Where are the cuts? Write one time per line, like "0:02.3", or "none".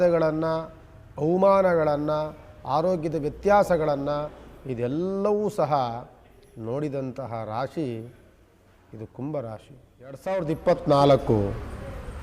0:10.4